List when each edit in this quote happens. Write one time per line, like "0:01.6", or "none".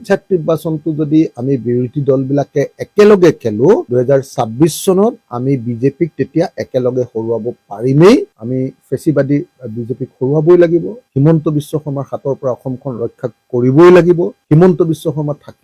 none